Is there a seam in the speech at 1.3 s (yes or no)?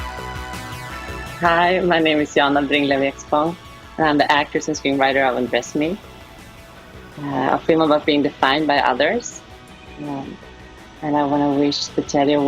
yes